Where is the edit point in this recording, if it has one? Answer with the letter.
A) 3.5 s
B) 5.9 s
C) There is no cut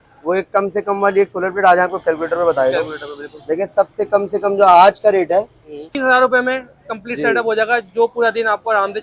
B